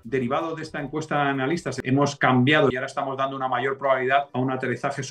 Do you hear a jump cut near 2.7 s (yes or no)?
yes